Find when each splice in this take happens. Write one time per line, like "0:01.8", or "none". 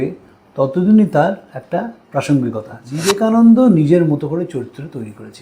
0:03.2